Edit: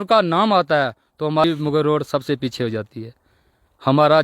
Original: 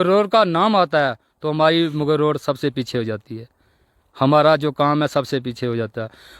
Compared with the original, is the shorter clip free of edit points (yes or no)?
no